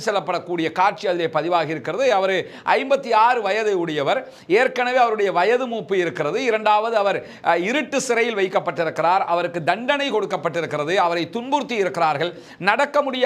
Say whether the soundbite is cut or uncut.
uncut